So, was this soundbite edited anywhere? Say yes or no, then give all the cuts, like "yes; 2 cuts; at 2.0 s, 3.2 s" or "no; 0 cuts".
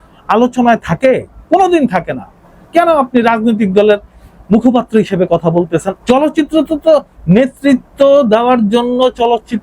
yes; 1 cut; at 5.9 s